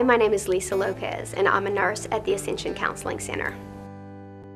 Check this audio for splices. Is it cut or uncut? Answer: cut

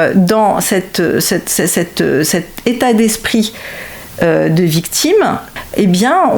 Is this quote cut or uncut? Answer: cut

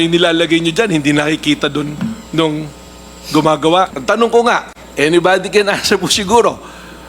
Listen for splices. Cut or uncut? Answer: cut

